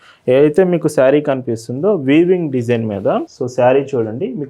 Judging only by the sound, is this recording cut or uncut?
cut